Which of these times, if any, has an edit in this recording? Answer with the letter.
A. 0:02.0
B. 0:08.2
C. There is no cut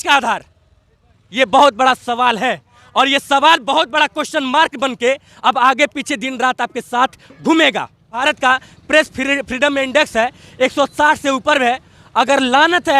B